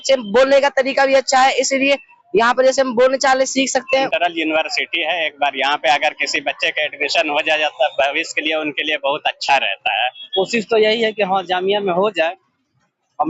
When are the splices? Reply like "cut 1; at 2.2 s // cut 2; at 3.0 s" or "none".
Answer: cut 1; at 3.9 s // cut 2; at 10.2 s